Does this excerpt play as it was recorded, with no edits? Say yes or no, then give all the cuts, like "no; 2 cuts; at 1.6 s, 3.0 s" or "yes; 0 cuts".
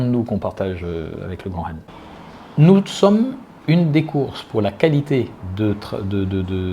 no; 1 cut; at 1.9 s